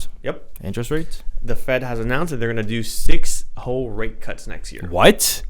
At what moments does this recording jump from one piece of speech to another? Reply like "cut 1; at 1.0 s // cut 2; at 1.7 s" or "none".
none